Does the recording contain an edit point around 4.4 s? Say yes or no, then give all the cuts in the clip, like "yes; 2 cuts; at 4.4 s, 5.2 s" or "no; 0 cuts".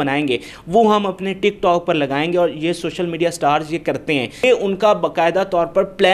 yes; 1 cut; at 4.4 s